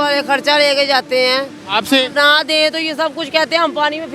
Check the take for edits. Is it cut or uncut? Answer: uncut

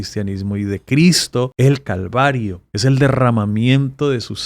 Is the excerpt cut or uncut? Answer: cut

